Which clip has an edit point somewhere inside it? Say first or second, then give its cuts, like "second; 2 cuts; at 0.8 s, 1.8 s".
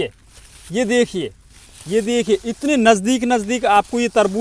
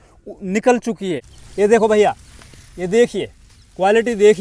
second; 1 cut; at 1.3 s